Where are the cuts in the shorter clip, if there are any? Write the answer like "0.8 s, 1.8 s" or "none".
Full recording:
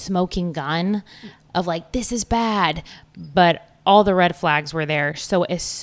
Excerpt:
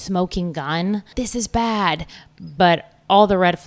1.1 s